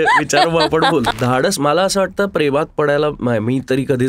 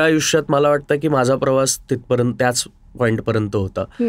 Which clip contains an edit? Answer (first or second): first